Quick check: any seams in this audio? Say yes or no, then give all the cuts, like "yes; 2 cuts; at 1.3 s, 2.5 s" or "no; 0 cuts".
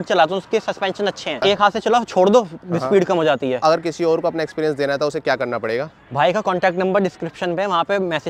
yes; 2 cuts; at 1.4 s, 3.6 s